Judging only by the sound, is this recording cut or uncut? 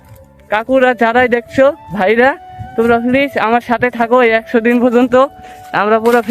uncut